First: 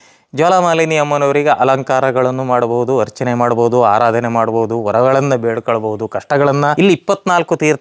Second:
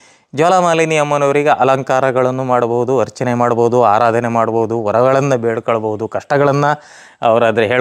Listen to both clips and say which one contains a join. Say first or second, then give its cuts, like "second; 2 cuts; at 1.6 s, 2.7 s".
first; 1 cut; at 6.7 s